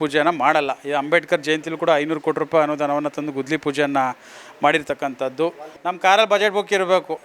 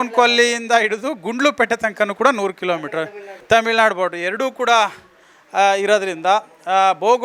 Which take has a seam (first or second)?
first